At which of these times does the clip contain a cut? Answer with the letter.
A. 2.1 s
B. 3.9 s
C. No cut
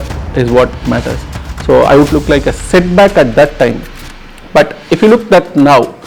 A